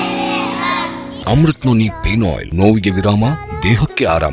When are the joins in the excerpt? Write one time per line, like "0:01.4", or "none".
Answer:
0:01.1
0:02.4